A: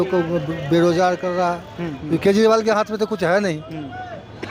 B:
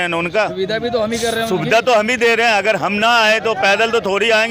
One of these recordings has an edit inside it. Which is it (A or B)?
A